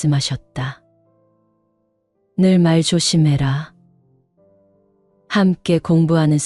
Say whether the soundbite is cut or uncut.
cut